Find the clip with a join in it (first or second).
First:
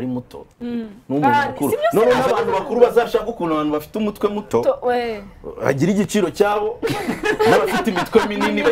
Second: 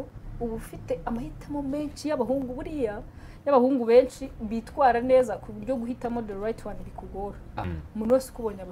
second